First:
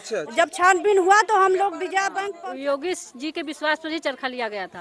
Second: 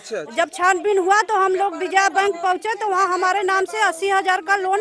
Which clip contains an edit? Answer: first; 1 cut; at 2.2 s

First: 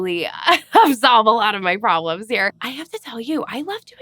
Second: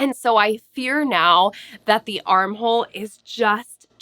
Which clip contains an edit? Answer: first; 1 cut; at 2.6 s

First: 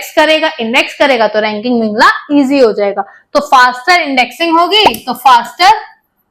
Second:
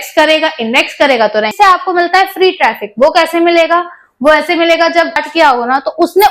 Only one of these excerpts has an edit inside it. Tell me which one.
second; 2 cuts; at 1.5 s, 5.3 s

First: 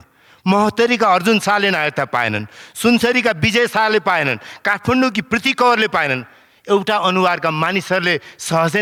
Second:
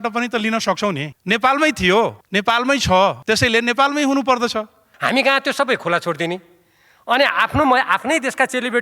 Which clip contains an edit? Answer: second; 4 cuts; at 1.1 s, 2.2 s, 3.2 s, 4.9 s

